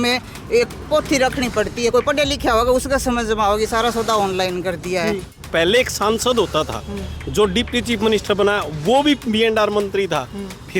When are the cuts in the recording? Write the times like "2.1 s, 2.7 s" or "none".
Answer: 5.3 s

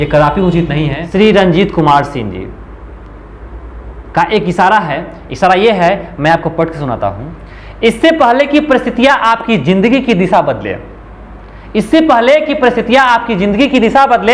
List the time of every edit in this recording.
1.0 s

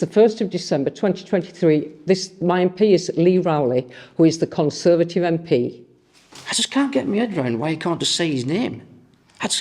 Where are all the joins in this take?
none

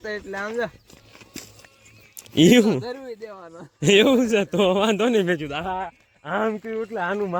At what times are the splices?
none

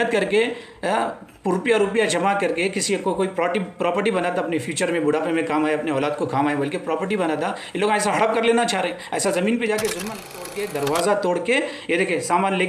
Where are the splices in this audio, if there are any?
10.4 s

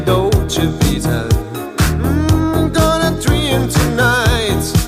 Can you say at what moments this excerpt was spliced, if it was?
none

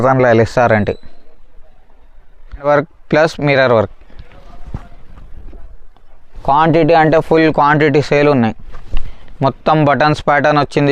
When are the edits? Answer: 2.7 s

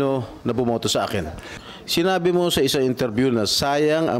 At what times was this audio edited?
1.4 s

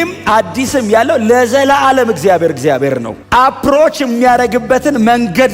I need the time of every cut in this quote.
none

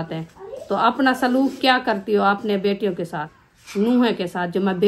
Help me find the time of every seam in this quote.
none

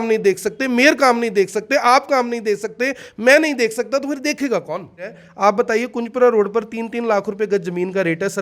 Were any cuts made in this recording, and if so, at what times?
5.2 s

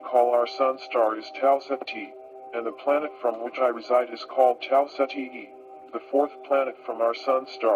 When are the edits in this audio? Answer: 3.6 s

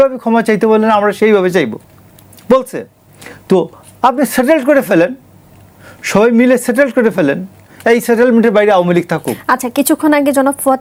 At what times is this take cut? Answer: none

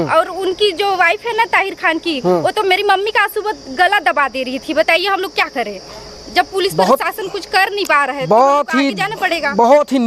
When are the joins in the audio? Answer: none

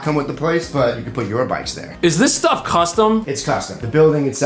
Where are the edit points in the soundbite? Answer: 1.8 s, 3.3 s

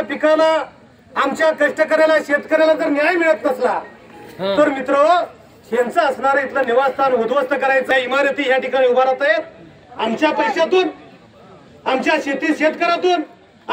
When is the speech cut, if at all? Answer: 7.9 s

